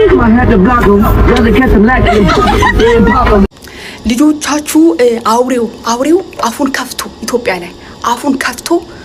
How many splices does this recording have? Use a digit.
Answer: 0